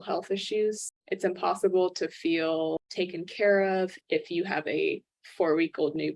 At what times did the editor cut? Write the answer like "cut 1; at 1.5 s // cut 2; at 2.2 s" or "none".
cut 1; at 0.8 s // cut 2; at 4.0 s